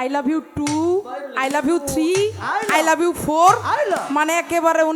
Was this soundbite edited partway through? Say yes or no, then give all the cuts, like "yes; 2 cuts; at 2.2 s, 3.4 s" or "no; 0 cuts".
no; 0 cuts